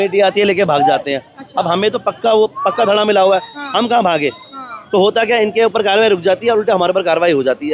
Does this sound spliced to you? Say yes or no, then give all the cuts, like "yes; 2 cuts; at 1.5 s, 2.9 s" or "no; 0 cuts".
no; 0 cuts